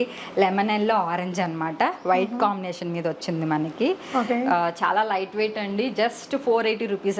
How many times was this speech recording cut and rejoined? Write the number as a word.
zero